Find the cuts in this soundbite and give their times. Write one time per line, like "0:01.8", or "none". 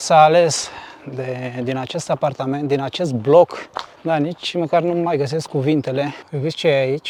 none